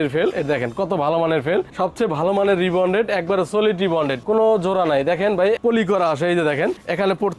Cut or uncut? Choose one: cut